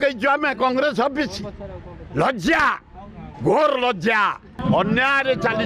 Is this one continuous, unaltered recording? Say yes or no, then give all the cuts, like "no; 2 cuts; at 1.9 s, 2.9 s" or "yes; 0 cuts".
no; 1 cut; at 4.5 s